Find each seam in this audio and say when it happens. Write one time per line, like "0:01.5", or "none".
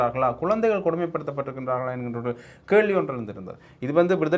none